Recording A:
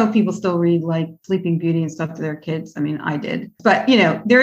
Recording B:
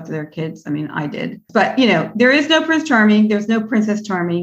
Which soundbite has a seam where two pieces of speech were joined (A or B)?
A